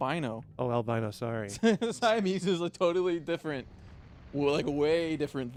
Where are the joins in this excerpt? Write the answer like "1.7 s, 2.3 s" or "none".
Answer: none